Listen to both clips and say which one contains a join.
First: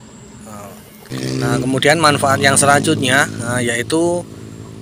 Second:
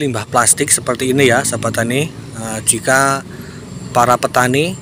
first; 1 cut; at 1.0 s

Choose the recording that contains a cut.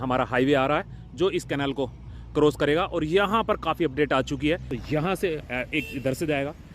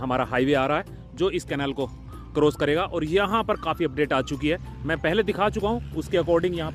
first; 1 cut; at 4.7 s

